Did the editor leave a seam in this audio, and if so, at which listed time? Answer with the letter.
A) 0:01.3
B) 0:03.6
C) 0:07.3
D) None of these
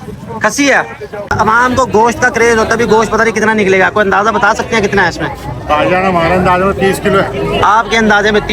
A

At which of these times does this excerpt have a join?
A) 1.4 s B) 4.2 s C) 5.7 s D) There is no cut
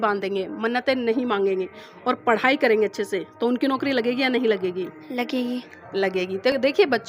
D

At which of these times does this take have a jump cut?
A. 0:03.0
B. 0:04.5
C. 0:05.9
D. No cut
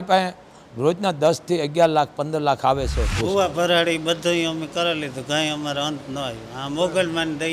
A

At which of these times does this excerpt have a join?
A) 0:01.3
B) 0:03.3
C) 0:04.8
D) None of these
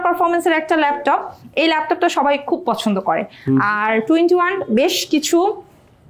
D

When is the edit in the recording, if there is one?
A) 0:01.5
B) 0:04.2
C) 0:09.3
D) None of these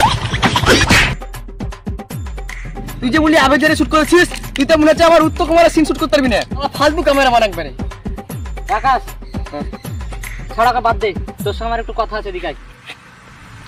D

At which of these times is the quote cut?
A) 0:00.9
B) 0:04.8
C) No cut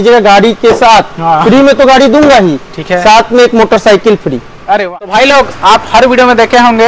B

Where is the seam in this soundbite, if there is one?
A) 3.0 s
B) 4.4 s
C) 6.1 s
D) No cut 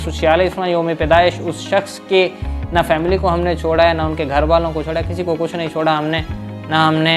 D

